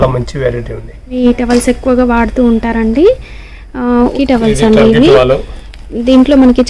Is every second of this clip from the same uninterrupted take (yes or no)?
no